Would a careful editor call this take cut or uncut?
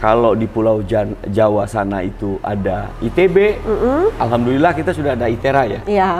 uncut